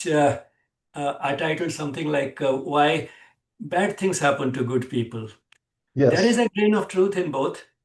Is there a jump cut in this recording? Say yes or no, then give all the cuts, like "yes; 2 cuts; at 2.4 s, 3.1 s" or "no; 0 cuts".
no; 0 cuts